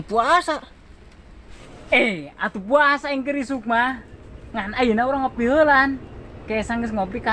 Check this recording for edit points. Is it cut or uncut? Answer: uncut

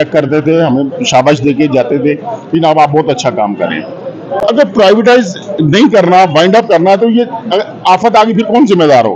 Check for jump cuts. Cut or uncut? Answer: uncut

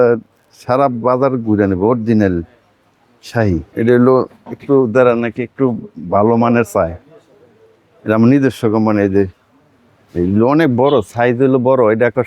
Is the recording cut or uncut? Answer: cut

